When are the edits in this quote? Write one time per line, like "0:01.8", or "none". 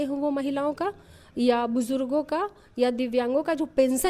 none